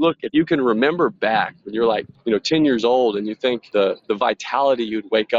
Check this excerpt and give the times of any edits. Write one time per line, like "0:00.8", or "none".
0:02.1
0:03.7

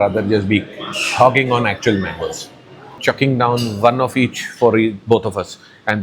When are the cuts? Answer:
0:03.0

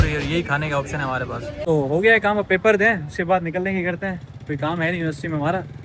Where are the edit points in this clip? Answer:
0:01.5

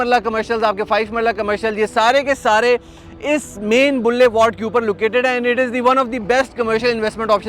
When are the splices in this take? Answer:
none

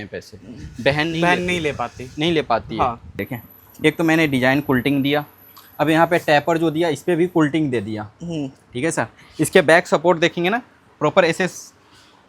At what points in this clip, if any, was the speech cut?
0:03.3

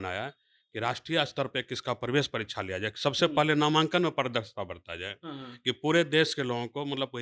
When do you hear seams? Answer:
none

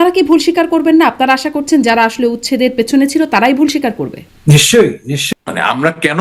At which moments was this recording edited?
0:05.1

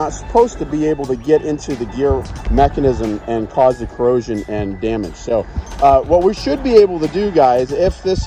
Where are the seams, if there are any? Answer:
none

